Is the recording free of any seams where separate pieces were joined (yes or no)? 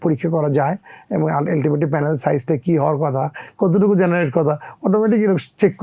yes